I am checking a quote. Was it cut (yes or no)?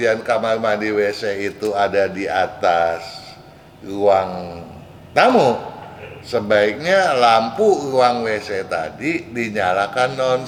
no